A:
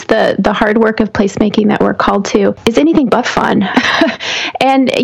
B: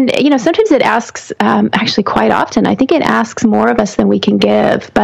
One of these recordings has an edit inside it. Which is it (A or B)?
A